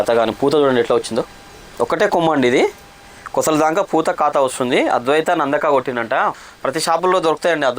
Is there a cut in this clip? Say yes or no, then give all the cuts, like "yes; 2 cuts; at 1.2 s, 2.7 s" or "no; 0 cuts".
yes; 1 cut; at 6.3 s